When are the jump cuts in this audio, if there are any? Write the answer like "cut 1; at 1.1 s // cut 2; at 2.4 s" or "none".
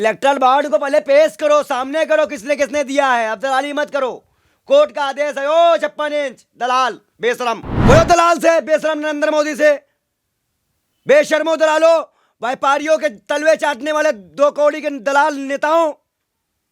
cut 1; at 7.7 s